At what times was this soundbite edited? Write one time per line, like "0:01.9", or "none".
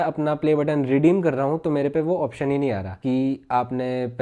0:02.9